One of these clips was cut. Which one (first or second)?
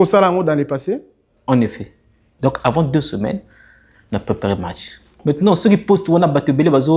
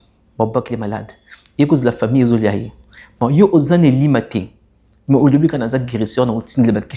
first